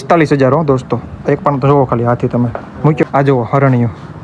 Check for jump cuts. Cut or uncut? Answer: cut